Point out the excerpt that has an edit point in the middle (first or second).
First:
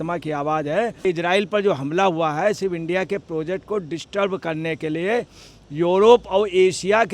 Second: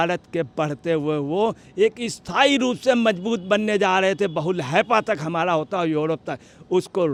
first